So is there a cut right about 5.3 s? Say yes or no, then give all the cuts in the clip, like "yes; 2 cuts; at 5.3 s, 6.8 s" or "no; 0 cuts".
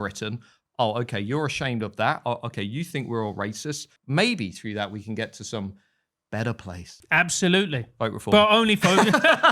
no; 2 cuts; at 3.9 s, 6.9 s